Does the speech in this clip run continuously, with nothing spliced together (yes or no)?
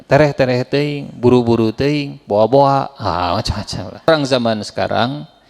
no